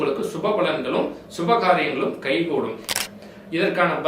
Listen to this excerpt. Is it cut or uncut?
cut